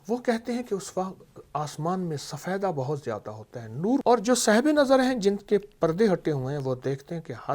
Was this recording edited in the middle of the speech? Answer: yes; 1 cut; at 4.0 s

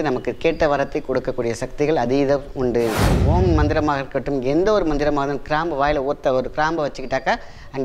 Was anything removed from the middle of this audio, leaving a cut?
yes; 1 cut; at 3.1 s

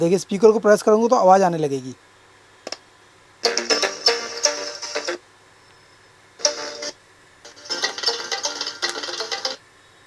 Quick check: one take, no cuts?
yes; 0 cuts

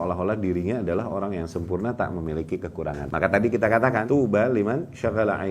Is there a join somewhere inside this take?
yes; 2 cuts; at 3.0 s, 4.0 s

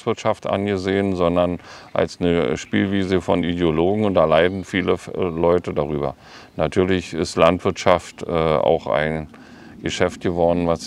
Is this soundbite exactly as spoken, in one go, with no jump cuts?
yes; 0 cuts

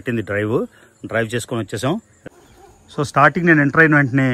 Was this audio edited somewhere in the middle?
yes; 1 cut; at 2.1 s

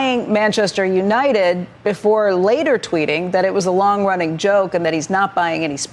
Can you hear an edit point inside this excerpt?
no; 0 cuts

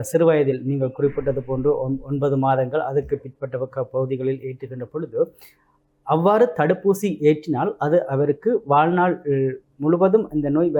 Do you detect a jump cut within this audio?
no; 0 cuts

